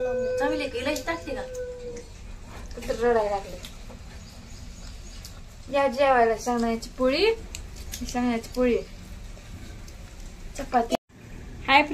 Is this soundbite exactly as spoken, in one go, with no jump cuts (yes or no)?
no